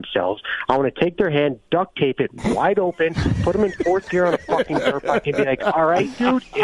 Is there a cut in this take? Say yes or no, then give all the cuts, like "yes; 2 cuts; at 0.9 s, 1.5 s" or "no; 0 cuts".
no; 0 cuts